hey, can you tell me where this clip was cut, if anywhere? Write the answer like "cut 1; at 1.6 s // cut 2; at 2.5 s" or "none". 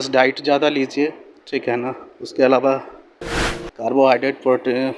none